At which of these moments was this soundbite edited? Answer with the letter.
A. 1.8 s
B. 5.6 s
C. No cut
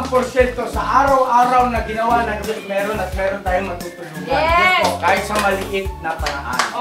C